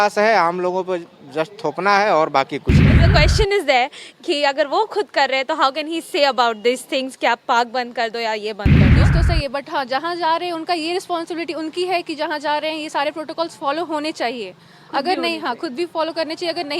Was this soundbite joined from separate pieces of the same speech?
yes; 3 cuts; at 3.0 s, 8.6 s, 9.3 s

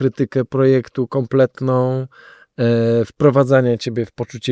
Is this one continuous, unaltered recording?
yes; 0 cuts

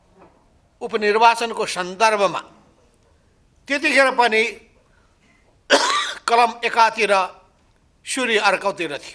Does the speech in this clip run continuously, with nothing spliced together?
yes; 0 cuts

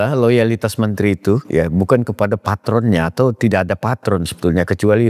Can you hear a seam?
no; 0 cuts

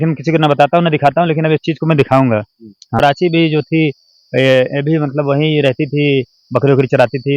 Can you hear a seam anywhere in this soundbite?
yes; 1 cut; at 2.9 s

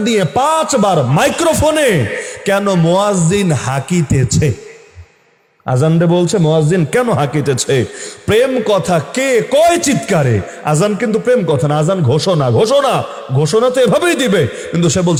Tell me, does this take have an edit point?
no; 0 cuts

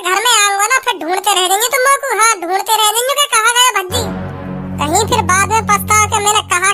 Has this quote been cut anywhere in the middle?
no; 0 cuts

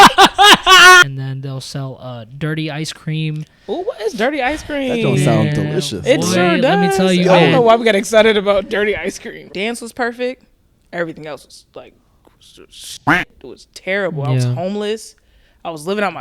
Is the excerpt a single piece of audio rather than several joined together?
no; 2 cuts; at 1.0 s, 9.4 s

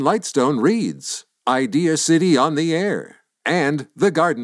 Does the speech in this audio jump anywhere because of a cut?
no; 0 cuts

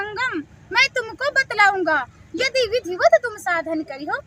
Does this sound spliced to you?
no; 0 cuts

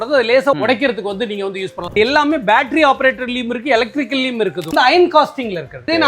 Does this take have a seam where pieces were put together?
yes; 2 cuts; at 1.8 s, 4.7 s

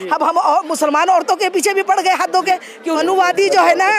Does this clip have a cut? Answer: yes; 1 cut; at 3.0 s

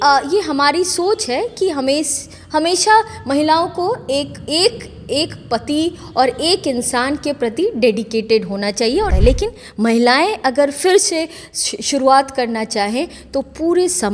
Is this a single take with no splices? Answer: no; 1 cut; at 9.1 s

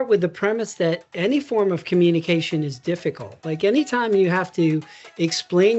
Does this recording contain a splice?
no; 0 cuts

